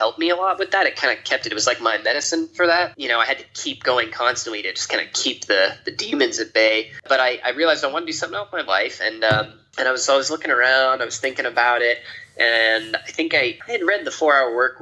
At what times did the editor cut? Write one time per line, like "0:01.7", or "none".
0:03.0
0:06.9
0:13.6